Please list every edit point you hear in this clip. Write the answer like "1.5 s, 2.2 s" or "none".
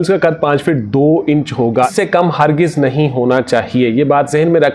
1.9 s